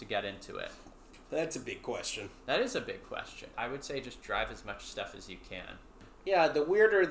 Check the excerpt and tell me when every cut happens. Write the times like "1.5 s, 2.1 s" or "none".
3.5 s, 6.0 s